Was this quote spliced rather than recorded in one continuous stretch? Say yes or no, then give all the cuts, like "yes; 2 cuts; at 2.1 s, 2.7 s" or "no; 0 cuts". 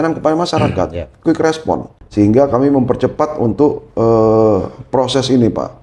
no; 0 cuts